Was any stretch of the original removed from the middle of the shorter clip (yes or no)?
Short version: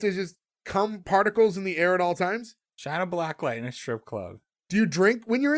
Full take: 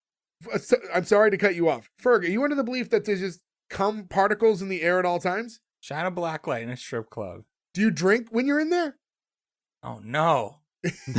no